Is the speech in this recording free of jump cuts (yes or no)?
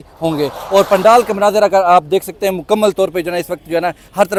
yes